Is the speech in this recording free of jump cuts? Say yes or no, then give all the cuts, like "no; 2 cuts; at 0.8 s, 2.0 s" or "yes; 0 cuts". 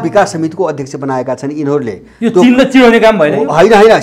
yes; 0 cuts